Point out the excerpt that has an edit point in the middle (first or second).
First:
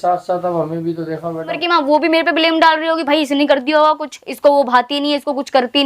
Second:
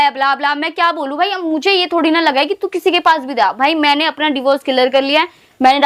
first